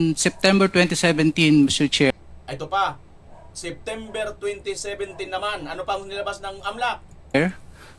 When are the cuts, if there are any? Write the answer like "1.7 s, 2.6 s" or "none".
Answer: none

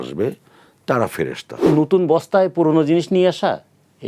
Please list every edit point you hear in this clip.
1.7 s

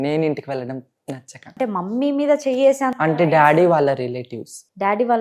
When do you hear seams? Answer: 1.5 s

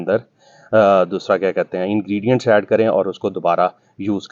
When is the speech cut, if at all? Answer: none

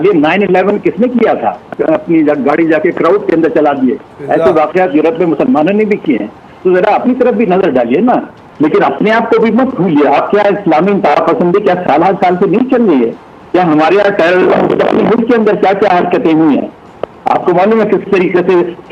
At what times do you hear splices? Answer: 1.7 s, 8.4 s

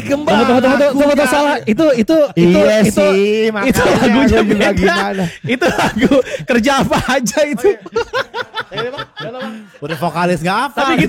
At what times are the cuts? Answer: none

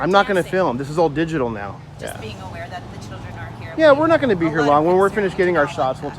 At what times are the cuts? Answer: 1.9 s

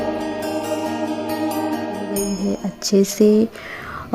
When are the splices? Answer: 2.2 s

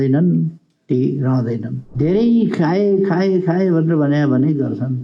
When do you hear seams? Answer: 1.8 s

